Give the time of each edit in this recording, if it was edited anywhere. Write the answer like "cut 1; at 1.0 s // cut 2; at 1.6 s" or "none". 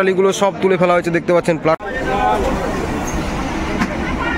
cut 1; at 1.8 s